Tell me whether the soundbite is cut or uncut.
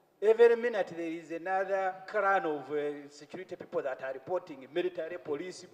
uncut